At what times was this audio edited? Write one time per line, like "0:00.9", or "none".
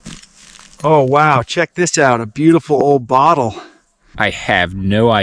0:04.0